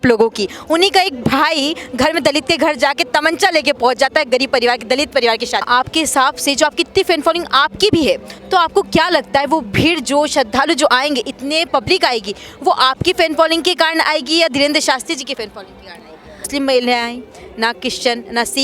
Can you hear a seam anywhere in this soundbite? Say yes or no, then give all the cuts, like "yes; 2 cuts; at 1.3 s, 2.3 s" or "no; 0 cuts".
yes; 2 cuts; at 5.7 s, 16.5 s